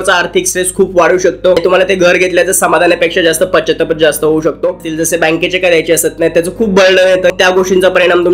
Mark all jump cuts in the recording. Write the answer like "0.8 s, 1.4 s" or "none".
1.6 s, 4.8 s, 7.3 s